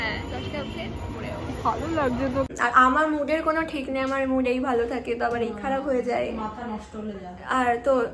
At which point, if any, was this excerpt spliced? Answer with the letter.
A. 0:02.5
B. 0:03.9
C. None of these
A